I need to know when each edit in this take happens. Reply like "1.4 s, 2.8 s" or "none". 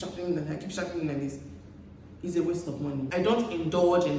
3.1 s